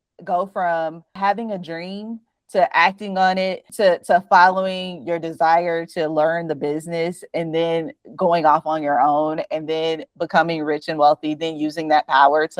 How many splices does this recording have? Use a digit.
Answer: 2